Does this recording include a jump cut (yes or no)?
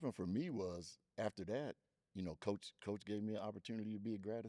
no